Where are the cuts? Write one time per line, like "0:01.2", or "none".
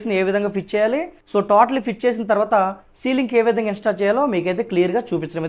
0:01.2